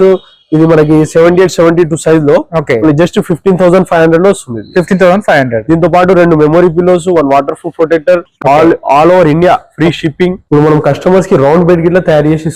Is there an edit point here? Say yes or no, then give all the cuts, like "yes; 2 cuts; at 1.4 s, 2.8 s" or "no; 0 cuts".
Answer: yes; 1 cut; at 10.4 s